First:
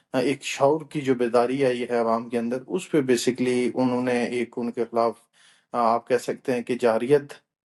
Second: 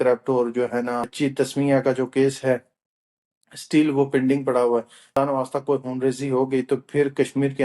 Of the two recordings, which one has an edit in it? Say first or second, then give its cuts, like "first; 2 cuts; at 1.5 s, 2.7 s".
second; 2 cuts; at 1.1 s, 5.0 s